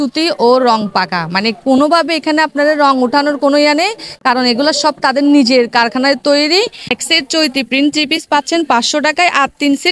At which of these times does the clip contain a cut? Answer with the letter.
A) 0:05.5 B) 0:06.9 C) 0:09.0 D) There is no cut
B